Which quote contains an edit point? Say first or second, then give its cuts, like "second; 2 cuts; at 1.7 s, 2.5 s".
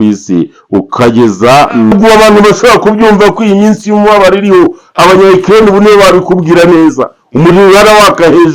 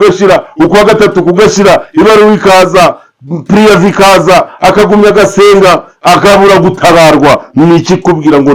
first; 1 cut; at 1.9 s